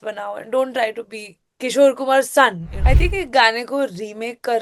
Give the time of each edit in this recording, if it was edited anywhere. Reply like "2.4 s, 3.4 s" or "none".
2.7 s